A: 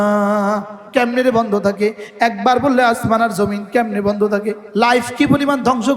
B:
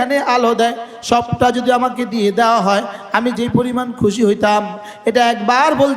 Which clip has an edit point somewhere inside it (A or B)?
A